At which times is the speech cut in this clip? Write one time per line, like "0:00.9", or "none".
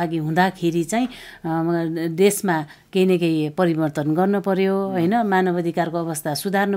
none